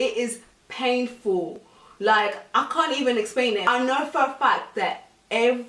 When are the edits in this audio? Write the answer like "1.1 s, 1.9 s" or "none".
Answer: none